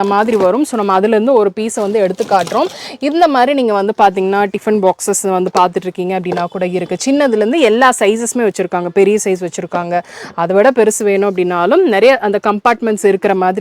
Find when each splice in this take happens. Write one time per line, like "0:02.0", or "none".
none